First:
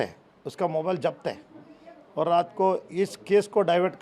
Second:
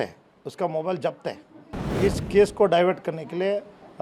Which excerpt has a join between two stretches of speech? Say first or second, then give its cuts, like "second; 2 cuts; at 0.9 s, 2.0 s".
second; 1 cut; at 1.9 s